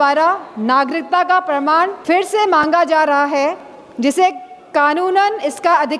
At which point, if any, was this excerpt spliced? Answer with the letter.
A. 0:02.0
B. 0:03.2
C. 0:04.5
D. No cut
A